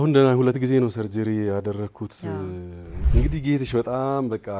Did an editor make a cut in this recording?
yes; 1 cut; at 2.9 s

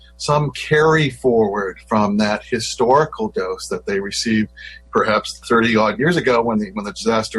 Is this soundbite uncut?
yes; 0 cuts

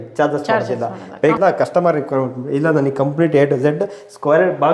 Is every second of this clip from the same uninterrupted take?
no; 1 cut; at 1.4 s

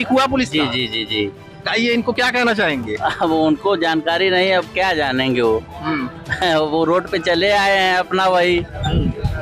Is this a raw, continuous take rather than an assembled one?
yes; 0 cuts

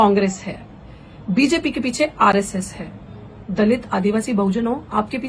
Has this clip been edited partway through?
no; 0 cuts

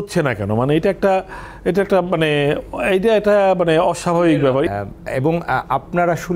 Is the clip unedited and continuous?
no; 1 cut; at 4.7 s

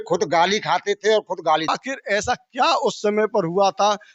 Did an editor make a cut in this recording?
yes; 1 cut; at 1.8 s

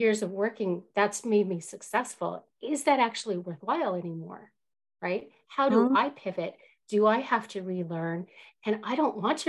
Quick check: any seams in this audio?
no; 0 cuts

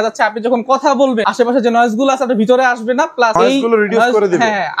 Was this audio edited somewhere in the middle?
yes; 2 cuts; at 1.2 s, 3.3 s

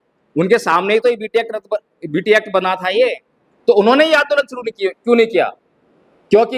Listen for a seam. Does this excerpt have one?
no; 0 cuts

